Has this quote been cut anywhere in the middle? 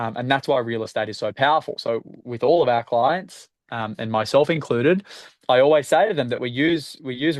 no; 0 cuts

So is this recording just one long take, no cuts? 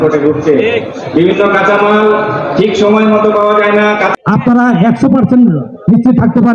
no; 1 cut; at 4.2 s

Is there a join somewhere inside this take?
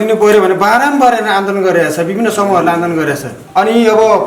no; 0 cuts

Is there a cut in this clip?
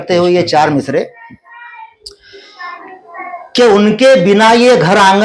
no; 0 cuts

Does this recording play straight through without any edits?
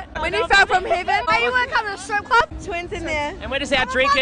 no; 2 cuts; at 1.3 s, 2.5 s

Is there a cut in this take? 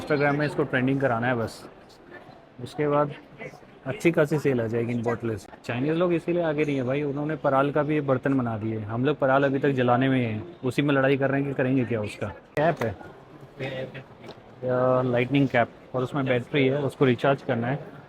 yes; 2 cuts; at 5.5 s, 12.4 s

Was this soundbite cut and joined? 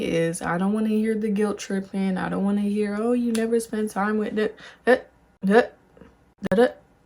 no; 0 cuts

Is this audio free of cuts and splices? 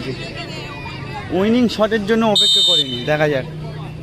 yes; 0 cuts

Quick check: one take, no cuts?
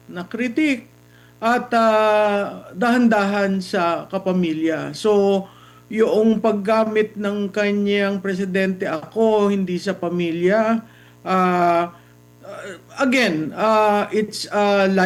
yes; 0 cuts

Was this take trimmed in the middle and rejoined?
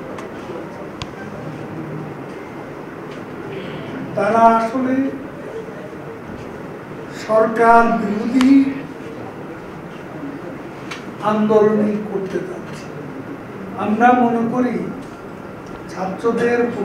yes; 1 cut; at 13.4 s

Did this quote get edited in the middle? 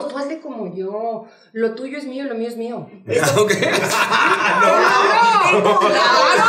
no; 0 cuts

